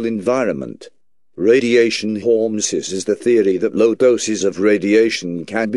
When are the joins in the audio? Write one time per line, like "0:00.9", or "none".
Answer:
0:02.7